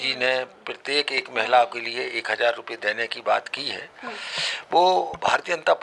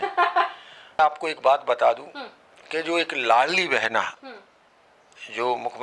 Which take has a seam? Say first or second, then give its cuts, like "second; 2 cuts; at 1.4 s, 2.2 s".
second; 1 cut; at 1.0 s